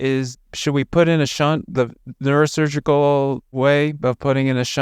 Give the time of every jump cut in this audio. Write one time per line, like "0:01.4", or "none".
none